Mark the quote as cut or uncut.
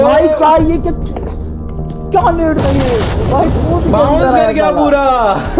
uncut